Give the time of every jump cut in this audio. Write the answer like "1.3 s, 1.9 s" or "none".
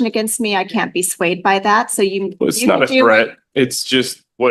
none